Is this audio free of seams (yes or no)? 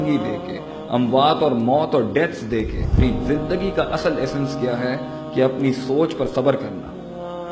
no